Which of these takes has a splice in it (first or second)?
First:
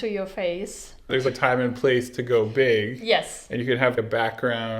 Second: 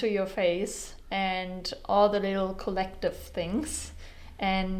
first